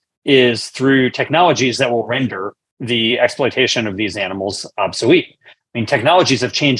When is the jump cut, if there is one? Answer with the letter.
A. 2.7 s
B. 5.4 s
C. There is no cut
C